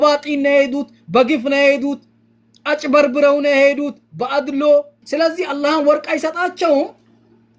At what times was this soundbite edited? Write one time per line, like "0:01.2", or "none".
0:05.0